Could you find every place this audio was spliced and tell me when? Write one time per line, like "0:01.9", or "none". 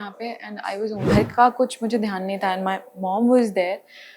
0:01.0